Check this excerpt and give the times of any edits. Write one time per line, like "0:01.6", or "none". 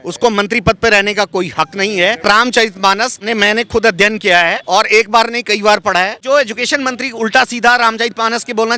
0:02.2
0:03.2
0:04.6
0:06.2